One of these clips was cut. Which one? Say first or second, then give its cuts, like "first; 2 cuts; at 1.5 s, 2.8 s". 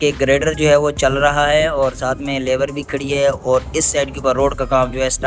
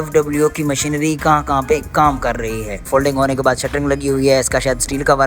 second; 1 cut; at 2.8 s